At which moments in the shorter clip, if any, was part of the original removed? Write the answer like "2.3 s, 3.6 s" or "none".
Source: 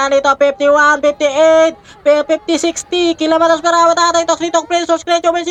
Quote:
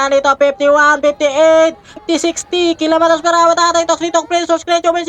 2.0 s